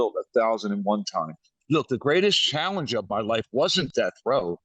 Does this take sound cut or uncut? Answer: cut